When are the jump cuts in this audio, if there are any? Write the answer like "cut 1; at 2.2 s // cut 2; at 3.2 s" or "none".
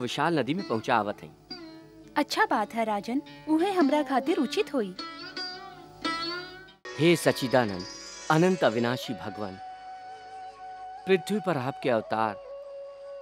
cut 1; at 6.8 s